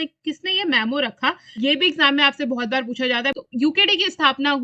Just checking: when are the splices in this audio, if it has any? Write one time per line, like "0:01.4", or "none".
0:01.5
0:03.4